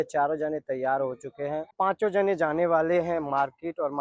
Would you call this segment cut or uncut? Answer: uncut